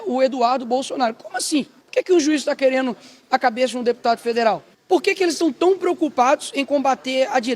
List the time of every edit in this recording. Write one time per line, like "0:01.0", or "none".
0:01.8
0:04.7